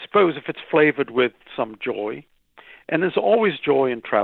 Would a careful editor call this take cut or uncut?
uncut